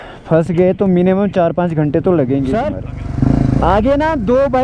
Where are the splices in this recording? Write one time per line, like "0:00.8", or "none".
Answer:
0:02.6